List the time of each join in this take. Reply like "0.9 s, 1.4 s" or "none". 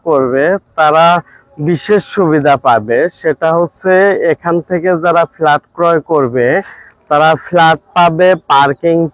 none